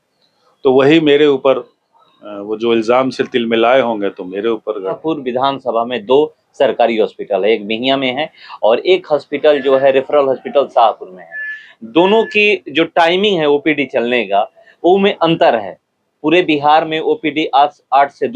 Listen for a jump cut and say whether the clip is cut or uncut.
cut